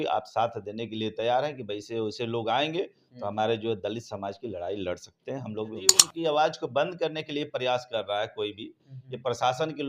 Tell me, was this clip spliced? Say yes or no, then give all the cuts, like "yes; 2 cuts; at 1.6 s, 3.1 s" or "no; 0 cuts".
yes; 1 cut; at 6.1 s